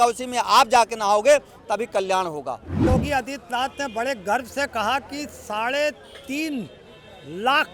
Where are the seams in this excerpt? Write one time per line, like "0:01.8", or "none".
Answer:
0:02.9

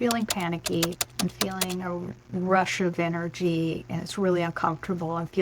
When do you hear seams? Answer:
0:01.0

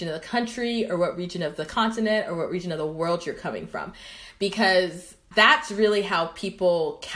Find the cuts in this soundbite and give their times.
none

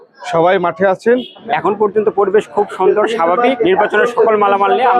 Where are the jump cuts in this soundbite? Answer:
0:01.4
0:03.6

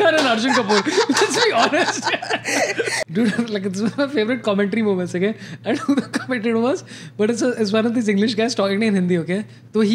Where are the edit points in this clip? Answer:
0:03.0

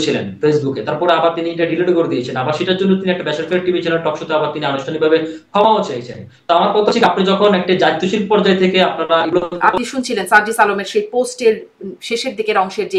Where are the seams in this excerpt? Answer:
0:09.5

